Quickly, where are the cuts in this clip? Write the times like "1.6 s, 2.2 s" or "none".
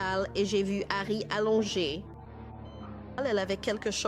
3.2 s